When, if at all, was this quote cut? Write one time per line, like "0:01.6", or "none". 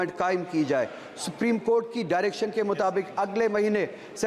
none